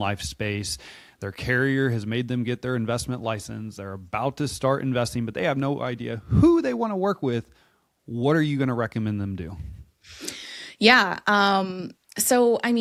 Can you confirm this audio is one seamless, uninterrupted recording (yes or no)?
yes